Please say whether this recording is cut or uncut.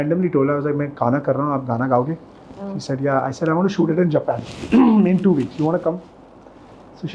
uncut